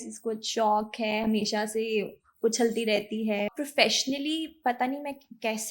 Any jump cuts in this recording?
yes; 1 cut; at 3.5 s

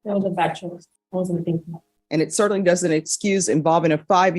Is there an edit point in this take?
yes; 2 cuts; at 0.9 s, 1.9 s

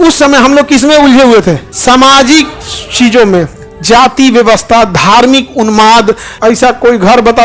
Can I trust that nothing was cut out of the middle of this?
no; 2 cuts; at 1.7 s, 6.3 s

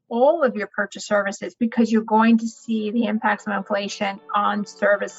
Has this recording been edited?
no; 0 cuts

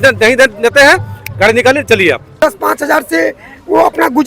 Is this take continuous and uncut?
no; 1 cut; at 2.3 s

